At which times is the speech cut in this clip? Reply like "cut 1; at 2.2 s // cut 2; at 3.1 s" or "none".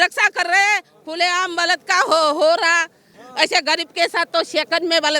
cut 1; at 3.2 s